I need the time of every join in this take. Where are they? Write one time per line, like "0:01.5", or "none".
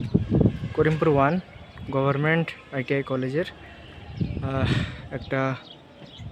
none